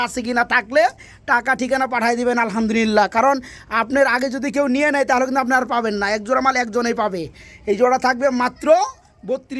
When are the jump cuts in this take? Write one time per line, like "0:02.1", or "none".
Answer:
none